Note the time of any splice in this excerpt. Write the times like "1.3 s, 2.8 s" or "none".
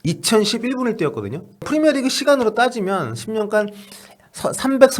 1.7 s

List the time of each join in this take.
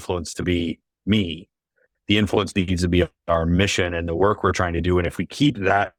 none

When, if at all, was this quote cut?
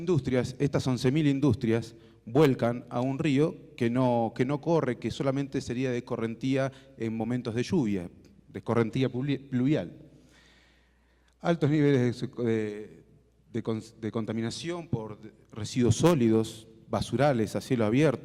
9.0 s

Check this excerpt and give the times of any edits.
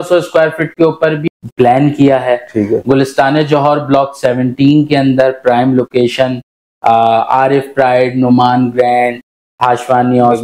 1.2 s

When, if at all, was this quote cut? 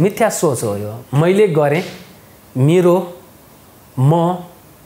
none

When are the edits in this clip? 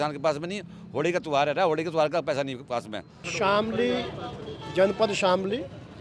3.2 s

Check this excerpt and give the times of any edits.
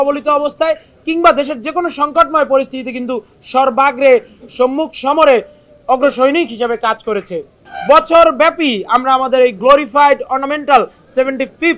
7.6 s

